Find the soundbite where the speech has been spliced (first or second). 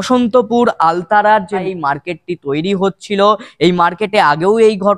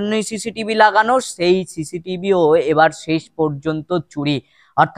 first